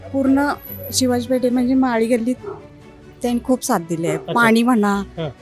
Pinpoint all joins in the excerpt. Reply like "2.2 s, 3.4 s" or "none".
none